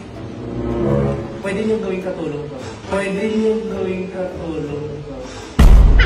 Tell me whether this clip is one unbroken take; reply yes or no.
yes